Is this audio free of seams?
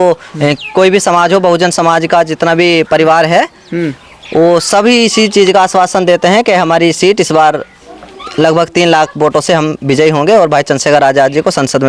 yes; 0 cuts

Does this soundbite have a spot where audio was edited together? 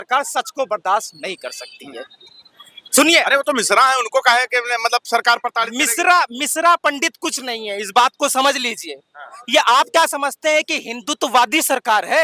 no; 0 cuts

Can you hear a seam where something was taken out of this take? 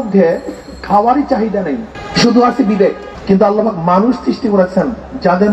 yes; 2 cuts; at 2.0 s, 3.1 s

